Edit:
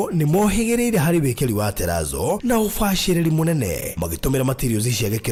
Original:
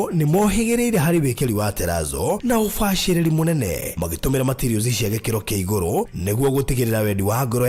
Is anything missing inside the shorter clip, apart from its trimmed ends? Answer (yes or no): no